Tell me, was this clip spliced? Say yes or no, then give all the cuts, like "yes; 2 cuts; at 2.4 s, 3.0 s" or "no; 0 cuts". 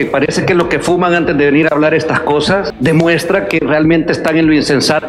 yes; 1 cut; at 2.7 s